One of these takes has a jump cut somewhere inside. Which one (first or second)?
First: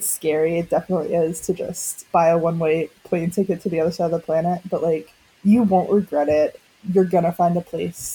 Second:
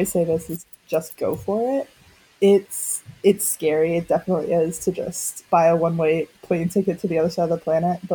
first